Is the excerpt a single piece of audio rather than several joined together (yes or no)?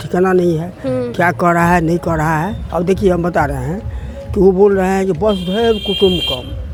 yes